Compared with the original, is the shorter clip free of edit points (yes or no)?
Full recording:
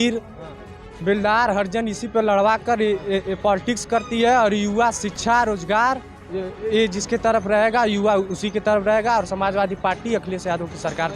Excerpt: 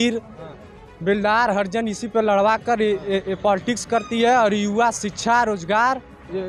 yes